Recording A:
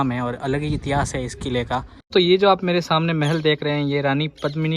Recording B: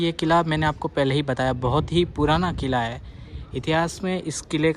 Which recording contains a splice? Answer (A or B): A